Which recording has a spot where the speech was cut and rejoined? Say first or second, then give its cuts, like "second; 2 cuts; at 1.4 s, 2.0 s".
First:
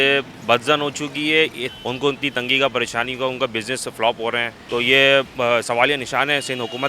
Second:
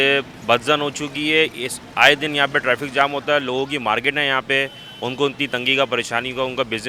first; 2 cuts; at 1.7 s, 4.5 s